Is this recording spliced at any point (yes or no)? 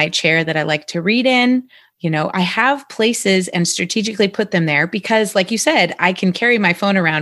no